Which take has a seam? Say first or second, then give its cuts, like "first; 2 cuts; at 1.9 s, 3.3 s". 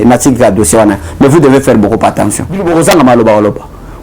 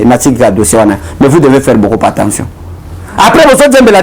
first; 1 cut; at 2.5 s